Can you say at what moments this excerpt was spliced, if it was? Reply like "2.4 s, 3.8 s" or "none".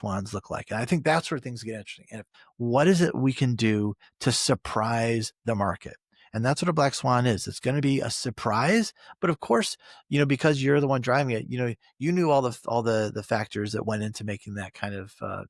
2.4 s